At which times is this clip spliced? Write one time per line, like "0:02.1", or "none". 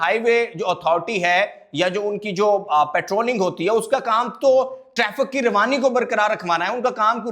none

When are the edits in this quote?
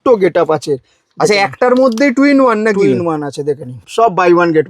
0:03.8

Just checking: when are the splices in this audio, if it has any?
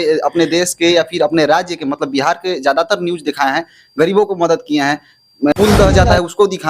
0:05.5

